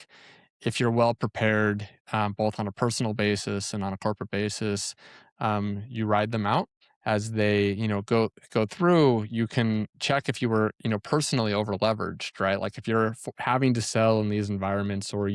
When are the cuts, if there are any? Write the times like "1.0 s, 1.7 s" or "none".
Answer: 6.8 s